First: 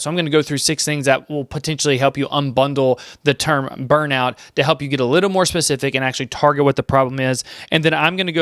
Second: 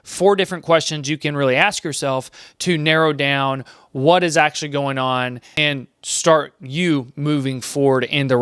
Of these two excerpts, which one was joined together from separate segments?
second; 1 cut; at 5.6 s

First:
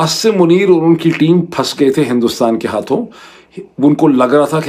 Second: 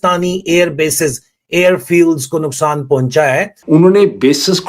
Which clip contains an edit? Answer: second; 1 cut; at 3.5 s

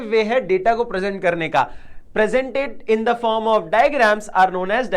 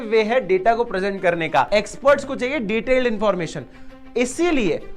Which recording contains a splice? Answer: second; 1 cut; at 1.7 s

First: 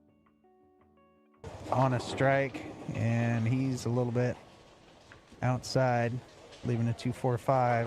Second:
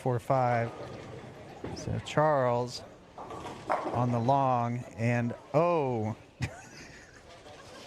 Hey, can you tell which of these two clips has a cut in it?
first; 1 cut; at 1.4 s

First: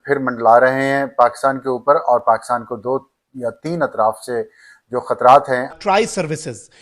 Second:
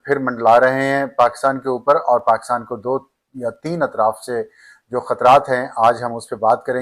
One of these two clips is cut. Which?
first; 1 cut; at 5.7 s

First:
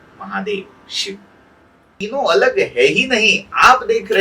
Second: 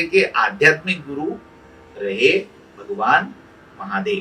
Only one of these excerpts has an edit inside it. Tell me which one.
first; 1 cut; at 1.9 s

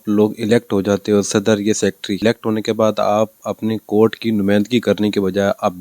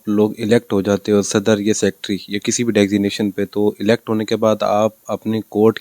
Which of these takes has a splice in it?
first; 1 cut; at 2.2 s

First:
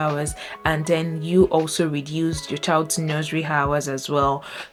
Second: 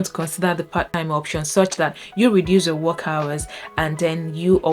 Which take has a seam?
second; 1 cut; at 0.9 s

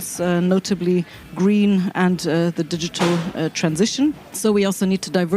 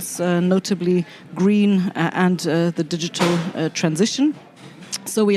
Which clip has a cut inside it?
first; 2 cuts; at 1.9 s, 4.3 s

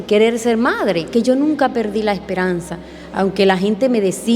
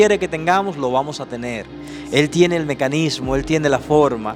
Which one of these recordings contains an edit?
first; 1 cut; at 1.1 s

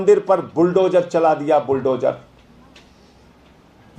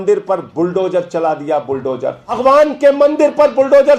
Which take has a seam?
second; 1 cut; at 2.3 s

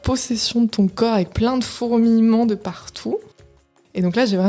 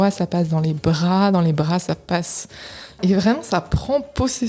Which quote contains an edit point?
second; 1 cut; at 3.0 s

